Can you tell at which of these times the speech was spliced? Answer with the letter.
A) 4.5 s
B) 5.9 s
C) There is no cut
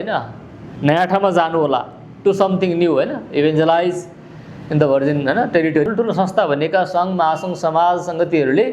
B